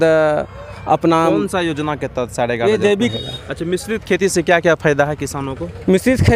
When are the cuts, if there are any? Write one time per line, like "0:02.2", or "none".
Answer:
0:03.1